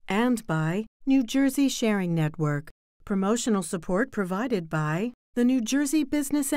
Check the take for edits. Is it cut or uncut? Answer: cut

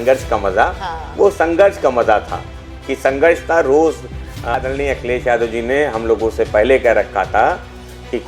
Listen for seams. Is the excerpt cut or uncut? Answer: cut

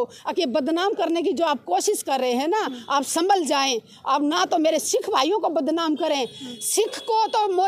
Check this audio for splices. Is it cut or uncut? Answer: uncut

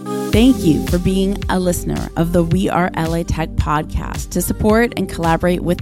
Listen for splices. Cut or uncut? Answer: uncut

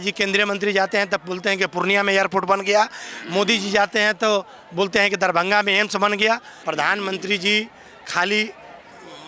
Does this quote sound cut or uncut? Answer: cut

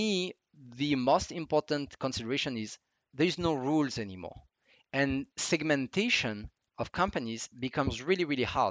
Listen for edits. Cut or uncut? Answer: uncut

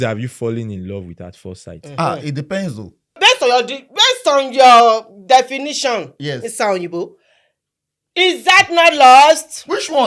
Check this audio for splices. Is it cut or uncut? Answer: cut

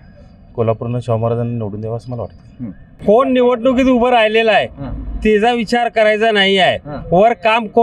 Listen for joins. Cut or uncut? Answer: cut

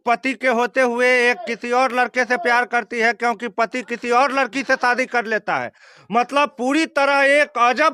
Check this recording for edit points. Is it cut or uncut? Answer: uncut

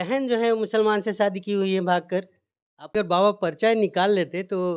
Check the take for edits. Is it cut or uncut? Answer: cut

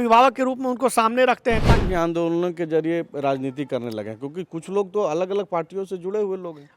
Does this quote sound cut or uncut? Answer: cut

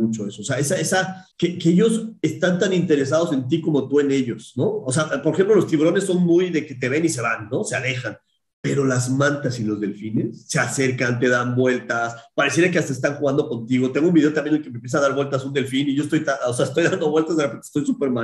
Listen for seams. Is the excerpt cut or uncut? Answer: cut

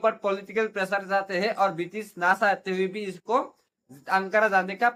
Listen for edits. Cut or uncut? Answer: uncut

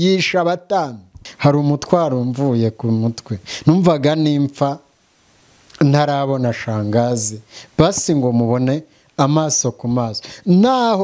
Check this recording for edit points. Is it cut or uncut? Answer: cut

